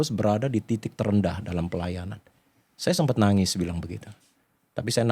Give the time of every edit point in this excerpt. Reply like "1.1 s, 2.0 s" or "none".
none